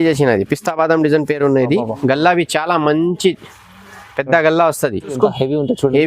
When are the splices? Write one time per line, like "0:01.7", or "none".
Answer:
0:05.1